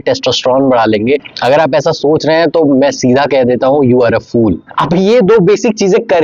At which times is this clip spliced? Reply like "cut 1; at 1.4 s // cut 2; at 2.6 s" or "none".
cut 1; at 4.6 s